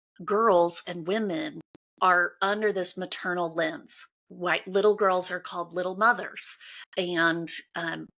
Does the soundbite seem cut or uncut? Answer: uncut